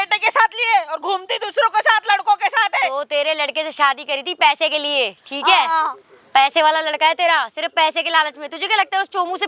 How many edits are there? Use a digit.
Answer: 0